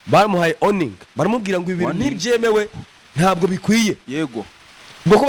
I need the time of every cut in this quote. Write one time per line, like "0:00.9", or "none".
none